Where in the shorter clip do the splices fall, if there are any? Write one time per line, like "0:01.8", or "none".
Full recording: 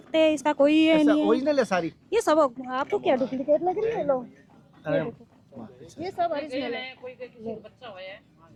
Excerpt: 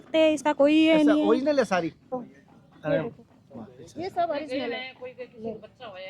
0:02.1